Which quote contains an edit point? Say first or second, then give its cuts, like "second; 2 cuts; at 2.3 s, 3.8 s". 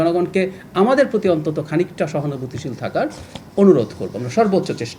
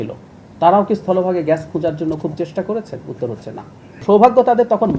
second; 1 cut; at 4.0 s